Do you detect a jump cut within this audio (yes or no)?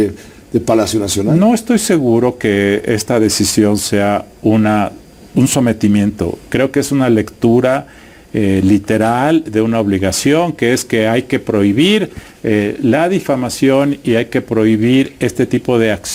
no